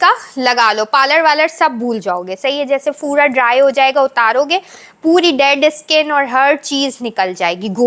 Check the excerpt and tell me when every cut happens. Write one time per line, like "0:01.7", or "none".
none